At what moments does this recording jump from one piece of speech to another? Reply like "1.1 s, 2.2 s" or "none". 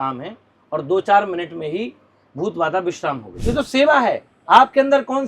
3.3 s